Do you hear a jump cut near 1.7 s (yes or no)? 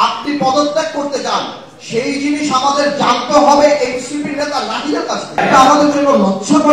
no